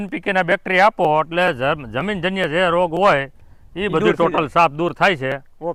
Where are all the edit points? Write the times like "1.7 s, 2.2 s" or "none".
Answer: none